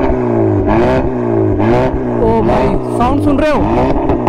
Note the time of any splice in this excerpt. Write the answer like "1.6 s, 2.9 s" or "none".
none

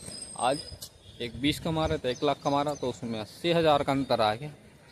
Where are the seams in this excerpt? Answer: none

